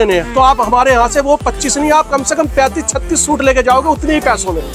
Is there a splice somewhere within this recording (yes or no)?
no